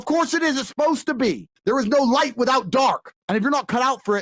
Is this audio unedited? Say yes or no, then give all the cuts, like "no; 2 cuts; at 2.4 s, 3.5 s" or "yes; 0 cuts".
no; 2 cuts; at 1.5 s, 3.1 s